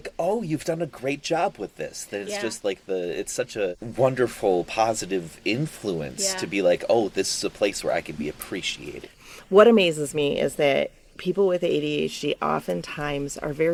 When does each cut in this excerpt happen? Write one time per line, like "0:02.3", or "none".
none